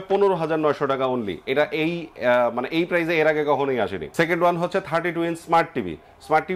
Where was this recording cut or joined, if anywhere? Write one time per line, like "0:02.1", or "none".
0:04.0